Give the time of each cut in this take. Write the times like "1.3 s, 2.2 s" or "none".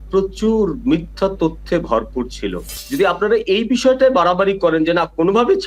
2.7 s